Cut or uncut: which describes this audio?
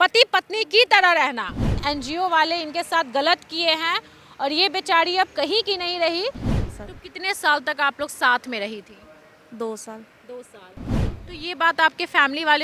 cut